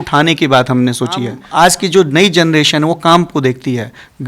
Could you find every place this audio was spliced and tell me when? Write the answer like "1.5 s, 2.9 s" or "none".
1.4 s